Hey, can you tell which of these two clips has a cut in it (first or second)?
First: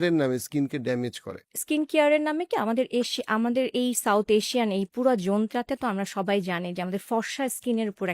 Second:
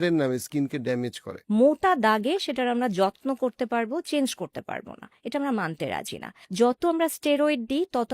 second